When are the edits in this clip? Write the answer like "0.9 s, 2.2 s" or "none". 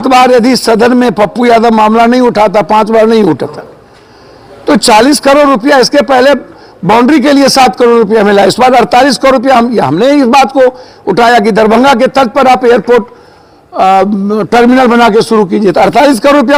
none